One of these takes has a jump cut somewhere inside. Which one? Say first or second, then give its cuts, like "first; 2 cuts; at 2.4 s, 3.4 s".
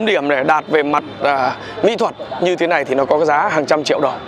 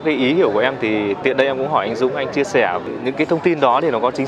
second; 1 cut; at 2.8 s